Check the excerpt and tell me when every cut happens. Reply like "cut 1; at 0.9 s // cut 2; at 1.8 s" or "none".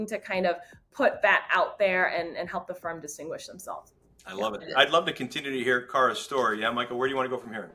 cut 1; at 4.6 s